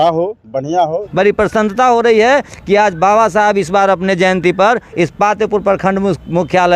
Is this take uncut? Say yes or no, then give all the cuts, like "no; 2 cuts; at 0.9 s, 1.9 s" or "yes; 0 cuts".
no; 1 cut; at 1.0 s